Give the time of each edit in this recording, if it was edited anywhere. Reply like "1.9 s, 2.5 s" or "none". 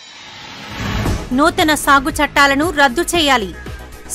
0.9 s